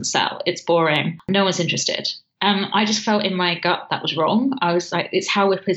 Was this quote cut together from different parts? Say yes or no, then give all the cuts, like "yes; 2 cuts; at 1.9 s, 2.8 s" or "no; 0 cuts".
yes; 1 cut; at 1.2 s